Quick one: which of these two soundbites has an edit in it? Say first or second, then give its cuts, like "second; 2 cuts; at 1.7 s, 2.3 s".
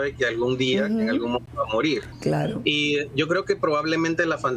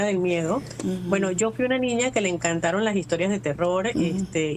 first; 1 cut; at 1.9 s